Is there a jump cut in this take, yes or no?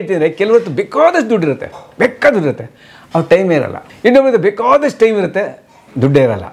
yes